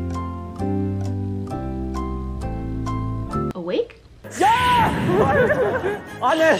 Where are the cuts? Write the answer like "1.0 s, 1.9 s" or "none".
none